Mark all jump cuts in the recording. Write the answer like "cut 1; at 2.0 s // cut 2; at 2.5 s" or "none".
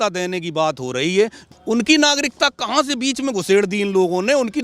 cut 1; at 1.5 s